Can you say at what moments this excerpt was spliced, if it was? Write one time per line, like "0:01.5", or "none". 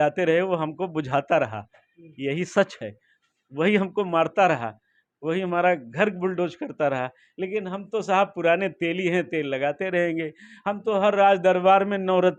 none